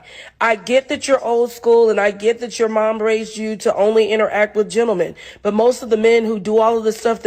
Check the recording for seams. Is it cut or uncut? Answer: uncut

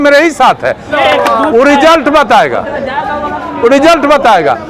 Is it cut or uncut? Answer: cut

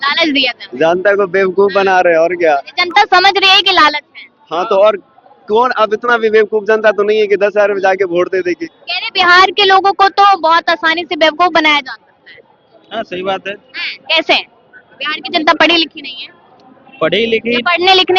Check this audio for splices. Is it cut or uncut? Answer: uncut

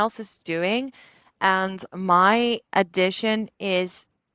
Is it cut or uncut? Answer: uncut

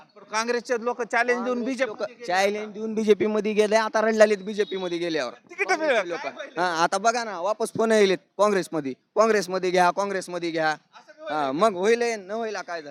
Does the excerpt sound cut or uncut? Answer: uncut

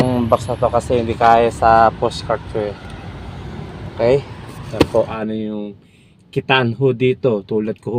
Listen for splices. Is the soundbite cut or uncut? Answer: cut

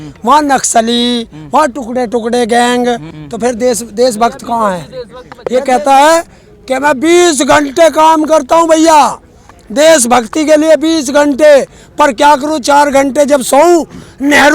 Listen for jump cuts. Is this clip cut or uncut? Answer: cut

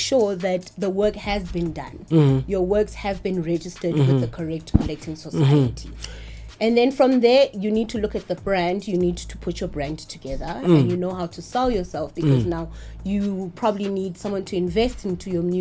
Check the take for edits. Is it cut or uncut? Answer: uncut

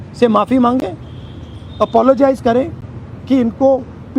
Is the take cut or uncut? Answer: uncut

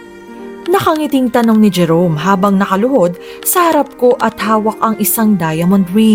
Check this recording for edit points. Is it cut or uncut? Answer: uncut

